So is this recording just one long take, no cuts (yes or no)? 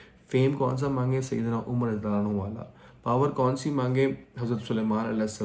yes